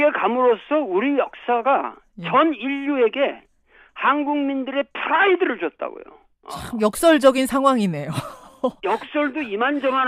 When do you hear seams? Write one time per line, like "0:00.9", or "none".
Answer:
0:08.2